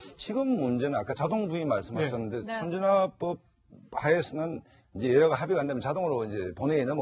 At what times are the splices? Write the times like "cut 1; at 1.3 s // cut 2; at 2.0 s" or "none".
cut 1; at 1.4 s